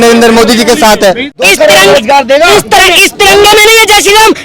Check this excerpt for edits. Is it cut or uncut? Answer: cut